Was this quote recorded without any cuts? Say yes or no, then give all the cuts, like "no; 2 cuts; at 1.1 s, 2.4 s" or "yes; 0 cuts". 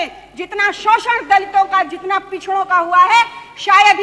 yes; 0 cuts